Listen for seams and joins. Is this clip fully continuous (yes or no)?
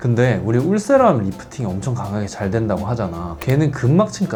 yes